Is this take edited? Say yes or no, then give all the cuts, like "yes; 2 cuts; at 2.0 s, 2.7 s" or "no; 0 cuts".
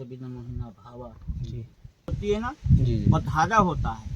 yes; 1 cut; at 2.1 s